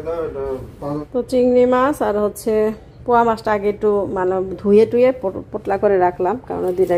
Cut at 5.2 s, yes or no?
no